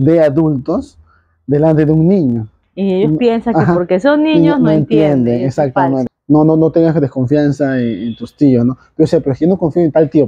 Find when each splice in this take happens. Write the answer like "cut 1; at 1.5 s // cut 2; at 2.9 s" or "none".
cut 1; at 6.1 s

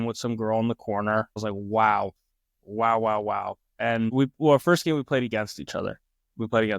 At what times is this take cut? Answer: cut 1; at 1.4 s // cut 2; at 4.1 s

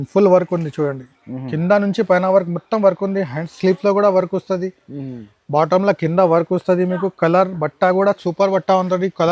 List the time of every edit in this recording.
none

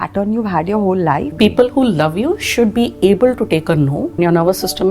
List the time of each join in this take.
cut 1; at 1.3 s // cut 2; at 4.1 s

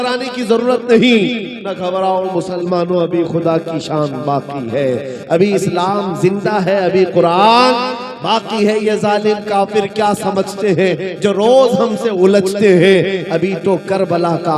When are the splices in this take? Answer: none

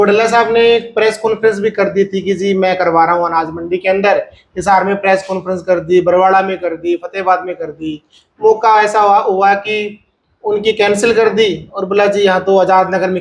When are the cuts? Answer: none

